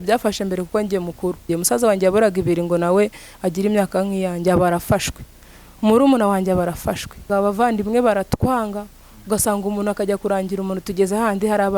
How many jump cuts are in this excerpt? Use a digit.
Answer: 2